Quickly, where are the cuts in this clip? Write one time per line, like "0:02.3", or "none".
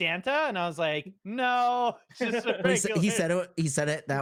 none

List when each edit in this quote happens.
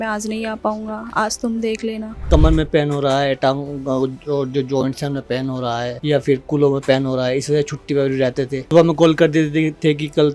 0:02.3
0:05.9
0:08.6

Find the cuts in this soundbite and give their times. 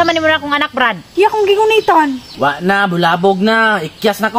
0:01.0

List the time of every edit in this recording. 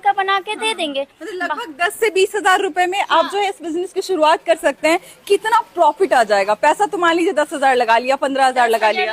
none

